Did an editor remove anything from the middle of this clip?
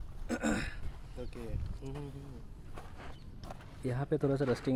no; 0 cuts

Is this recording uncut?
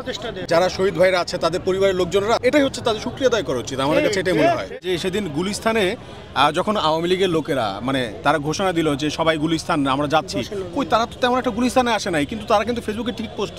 no; 2 cuts; at 2.4 s, 4.8 s

